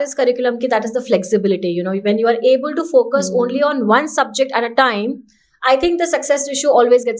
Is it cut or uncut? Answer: uncut